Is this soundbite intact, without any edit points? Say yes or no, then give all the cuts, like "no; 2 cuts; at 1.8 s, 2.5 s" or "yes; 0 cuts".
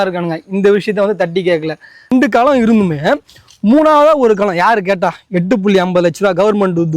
no; 1 cut; at 2.1 s